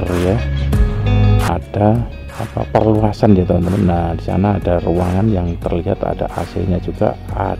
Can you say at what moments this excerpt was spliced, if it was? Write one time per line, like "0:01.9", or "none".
0:01.5